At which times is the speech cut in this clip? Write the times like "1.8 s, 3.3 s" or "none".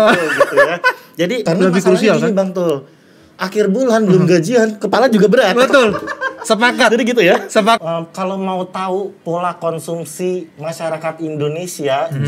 1.4 s, 7.8 s